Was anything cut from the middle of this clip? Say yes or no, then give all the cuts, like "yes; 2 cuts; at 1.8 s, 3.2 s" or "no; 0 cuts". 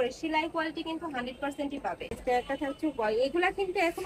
yes; 1 cut; at 2.2 s